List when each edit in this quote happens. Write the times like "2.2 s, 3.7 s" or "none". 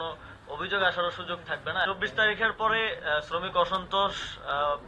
1.9 s